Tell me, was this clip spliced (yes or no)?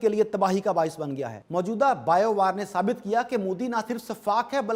yes